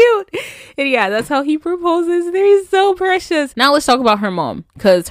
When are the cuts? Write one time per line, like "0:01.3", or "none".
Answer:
0:03.5